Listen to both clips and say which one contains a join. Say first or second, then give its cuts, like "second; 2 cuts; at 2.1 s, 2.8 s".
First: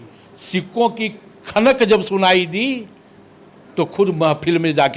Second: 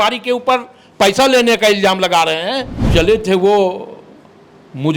second; 1 cut; at 2.7 s